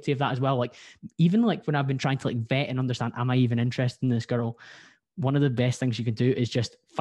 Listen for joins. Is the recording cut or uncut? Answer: uncut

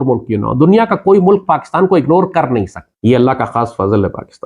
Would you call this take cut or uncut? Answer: uncut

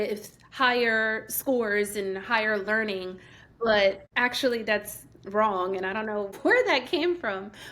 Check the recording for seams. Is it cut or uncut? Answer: cut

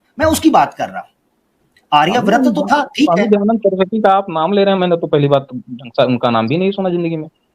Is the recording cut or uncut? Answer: uncut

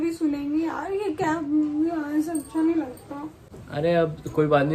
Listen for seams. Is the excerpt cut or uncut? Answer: uncut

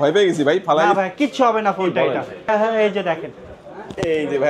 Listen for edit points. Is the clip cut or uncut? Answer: cut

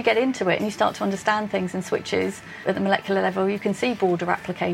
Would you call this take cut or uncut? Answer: cut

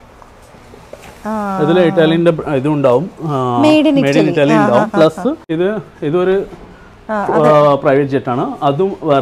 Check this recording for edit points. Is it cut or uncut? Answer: cut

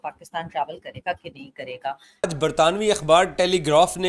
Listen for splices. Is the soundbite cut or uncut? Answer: cut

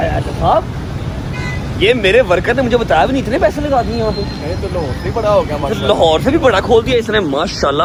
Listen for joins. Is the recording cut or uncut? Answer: uncut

